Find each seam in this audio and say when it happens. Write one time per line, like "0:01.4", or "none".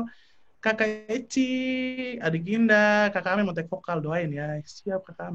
none